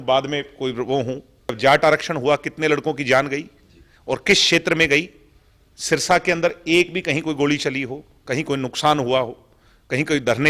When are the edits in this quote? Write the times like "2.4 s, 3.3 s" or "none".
1.6 s

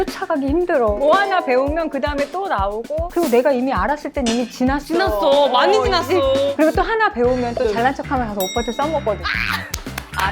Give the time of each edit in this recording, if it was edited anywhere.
1.0 s, 3.1 s, 6.5 s

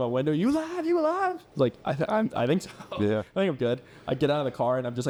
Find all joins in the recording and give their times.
none

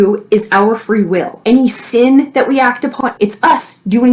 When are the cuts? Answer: 3.0 s

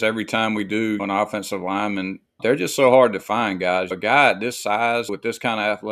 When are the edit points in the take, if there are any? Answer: 1.0 s, 2.4 s, 3.9 s, 5.1 s

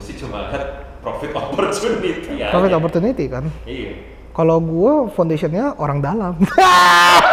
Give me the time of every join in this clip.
none

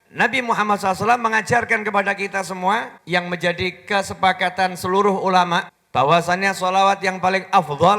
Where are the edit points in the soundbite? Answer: 2.9 s, 5.8 s

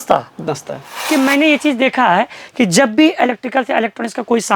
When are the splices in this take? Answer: 1.0 s

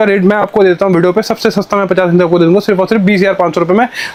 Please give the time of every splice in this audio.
none

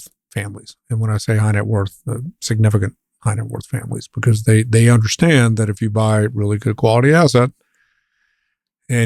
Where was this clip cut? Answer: none

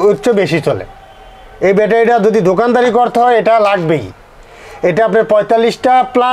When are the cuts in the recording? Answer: none

